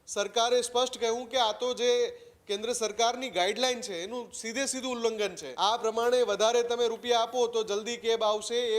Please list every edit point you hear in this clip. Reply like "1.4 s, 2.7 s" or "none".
5.4 s